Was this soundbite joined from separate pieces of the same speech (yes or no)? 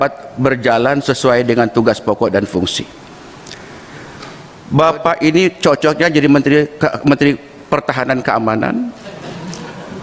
yes